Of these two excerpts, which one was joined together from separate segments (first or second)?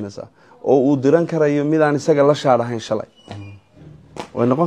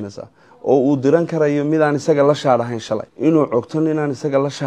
second